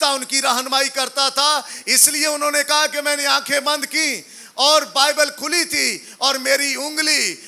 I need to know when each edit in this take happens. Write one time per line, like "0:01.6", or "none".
none